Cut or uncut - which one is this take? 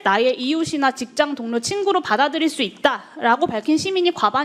uncut